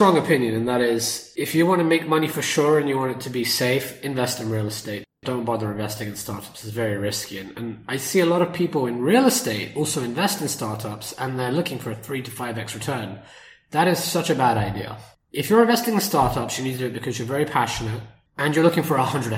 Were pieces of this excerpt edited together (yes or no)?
no